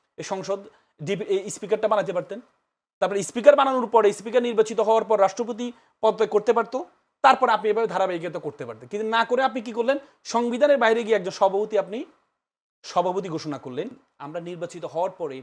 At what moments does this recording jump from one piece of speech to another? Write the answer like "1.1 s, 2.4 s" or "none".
14.1 s